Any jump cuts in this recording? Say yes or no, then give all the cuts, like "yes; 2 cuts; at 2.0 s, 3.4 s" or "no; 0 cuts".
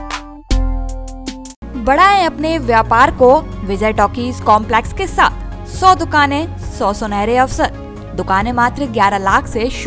no; 0 cuts